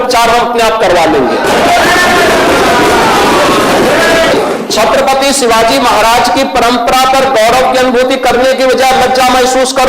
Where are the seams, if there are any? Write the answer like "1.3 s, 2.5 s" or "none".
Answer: 4.3 s